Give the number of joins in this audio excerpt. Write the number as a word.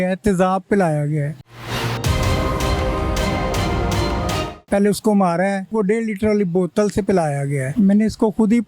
four